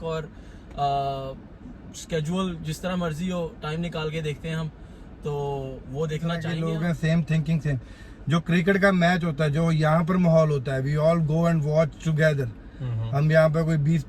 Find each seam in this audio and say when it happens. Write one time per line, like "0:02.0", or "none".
0:06.5